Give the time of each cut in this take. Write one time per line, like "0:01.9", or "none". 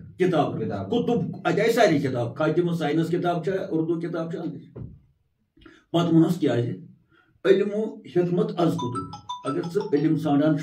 none